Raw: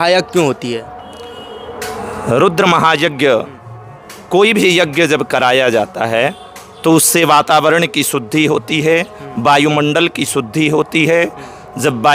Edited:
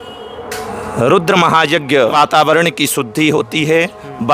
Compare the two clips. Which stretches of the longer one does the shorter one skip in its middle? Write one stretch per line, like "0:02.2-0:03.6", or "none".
0:03.4-0:07.3